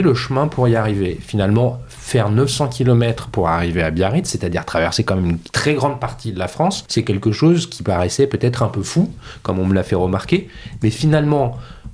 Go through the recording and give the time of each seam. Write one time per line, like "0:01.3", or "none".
0:06.8

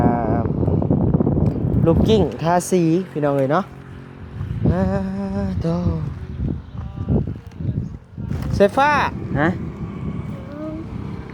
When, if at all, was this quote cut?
0:09.2

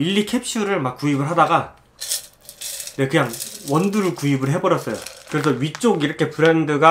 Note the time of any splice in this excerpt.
0:05.2

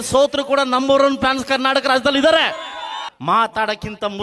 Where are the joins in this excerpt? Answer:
0:03.1

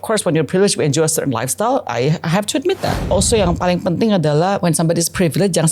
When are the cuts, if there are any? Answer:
0:03.0

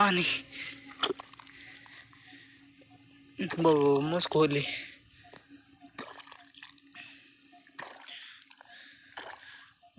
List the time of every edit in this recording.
none

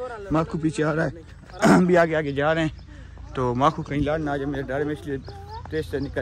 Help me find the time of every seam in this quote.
none

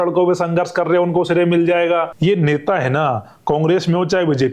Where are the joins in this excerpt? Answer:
0:02.1

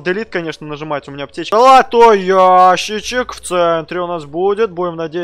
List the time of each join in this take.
0:01.4

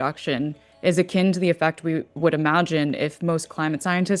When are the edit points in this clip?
none

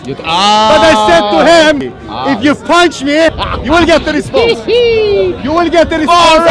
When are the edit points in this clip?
0:01.8
0:03.5

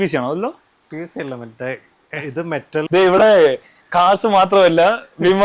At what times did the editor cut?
0:02.8

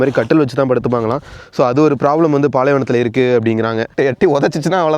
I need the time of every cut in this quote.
0:03.9

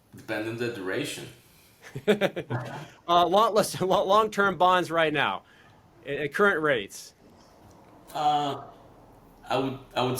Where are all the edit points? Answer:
none

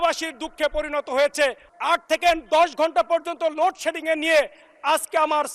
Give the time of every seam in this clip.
0:01.6

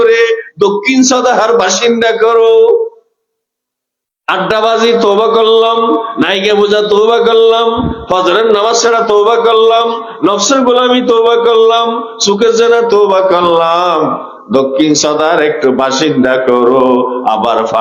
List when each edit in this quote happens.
none

